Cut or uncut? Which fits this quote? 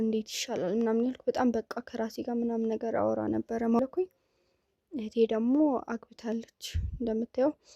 cut